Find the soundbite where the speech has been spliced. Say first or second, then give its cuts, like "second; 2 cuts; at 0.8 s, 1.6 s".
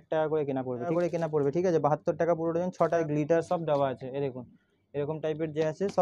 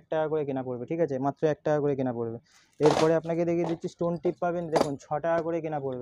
first; 2 cuts; at 0.9 s, 3.0 s